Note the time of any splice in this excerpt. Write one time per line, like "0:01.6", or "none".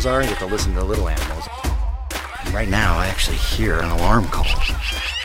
none